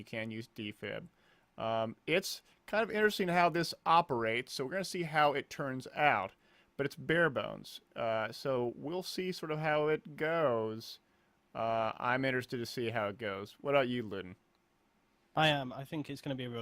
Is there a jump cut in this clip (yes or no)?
yes